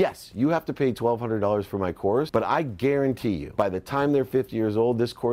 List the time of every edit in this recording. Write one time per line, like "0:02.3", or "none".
0:02.3
0:03.5